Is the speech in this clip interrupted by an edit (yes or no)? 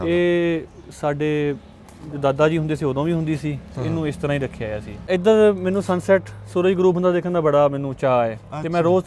yes